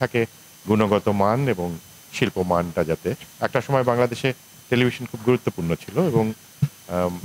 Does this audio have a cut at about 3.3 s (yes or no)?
yes